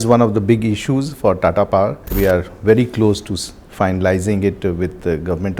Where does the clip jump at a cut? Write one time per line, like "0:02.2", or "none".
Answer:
0:02.1

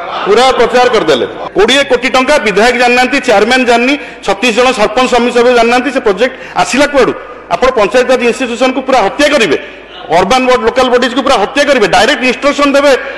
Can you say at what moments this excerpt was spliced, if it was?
0:01.4

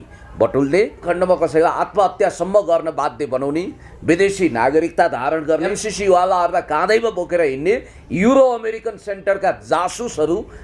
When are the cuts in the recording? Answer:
0:01.1
0:05.8

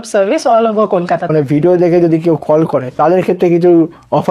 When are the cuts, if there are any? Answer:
0:01.3
0:03.0

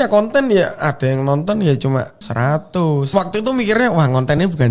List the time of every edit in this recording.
0:02.2
0:03.1

